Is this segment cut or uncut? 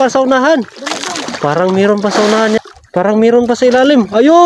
cut